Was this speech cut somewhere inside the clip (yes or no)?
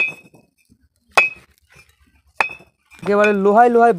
yes